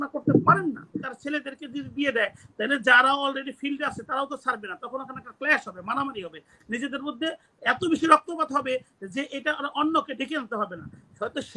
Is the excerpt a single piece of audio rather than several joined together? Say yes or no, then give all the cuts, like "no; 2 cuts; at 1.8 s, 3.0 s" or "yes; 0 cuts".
no; 1 cut; at 1.1 s